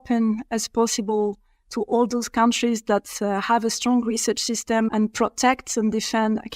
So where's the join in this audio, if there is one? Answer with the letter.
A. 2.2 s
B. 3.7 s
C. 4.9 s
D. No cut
C